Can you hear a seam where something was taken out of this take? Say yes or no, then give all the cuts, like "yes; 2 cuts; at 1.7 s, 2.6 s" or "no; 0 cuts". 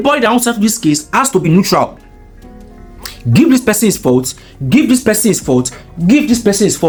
no; 0 cuts